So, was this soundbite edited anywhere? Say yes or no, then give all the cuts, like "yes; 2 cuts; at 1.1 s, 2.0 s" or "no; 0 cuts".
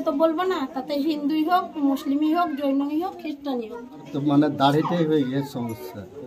yes; 1 cut; at 4.1 s